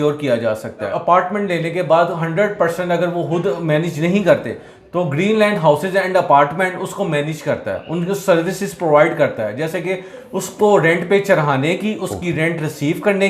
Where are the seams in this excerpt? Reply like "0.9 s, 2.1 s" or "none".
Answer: 0.9 s